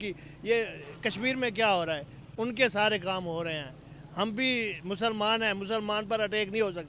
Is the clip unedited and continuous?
yes; 0 cuts

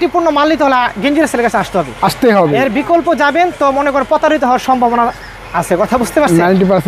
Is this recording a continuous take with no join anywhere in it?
yes; 0 cuts

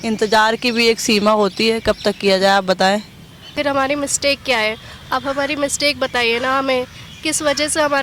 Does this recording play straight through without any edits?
no; 1 cut; at 3.5 s

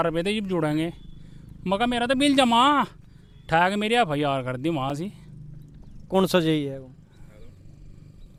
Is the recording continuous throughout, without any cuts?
yes; 0 cuts

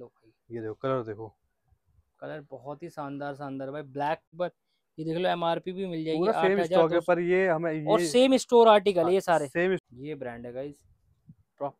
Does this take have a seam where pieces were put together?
yes; 2 cuts; at 4.3 s, 9.8 s

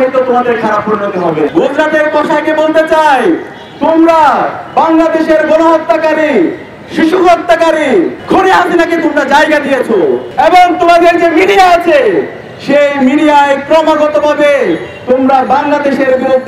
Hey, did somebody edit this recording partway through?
yes; 3 cuts; at 1.5 s, 8.2 s, 10.3 s

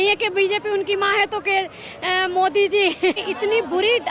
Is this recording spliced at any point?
yes; 1 cut; at 3.2 s

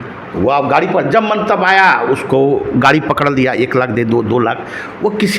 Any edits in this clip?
no; 0 cuts

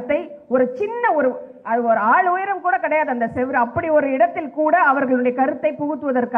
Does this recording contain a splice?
no; 0 cuts

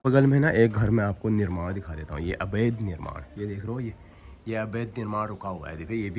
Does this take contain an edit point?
no; 0 cuts

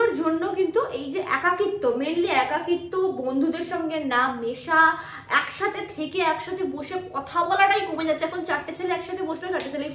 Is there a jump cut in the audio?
no; 0 cuts

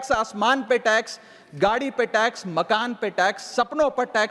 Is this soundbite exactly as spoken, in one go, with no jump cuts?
yes; 0 cuts

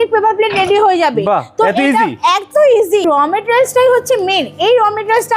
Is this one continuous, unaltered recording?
no; 1 cut; at 3.0 s

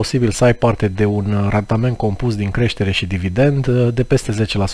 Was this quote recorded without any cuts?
yes; 0 cuts

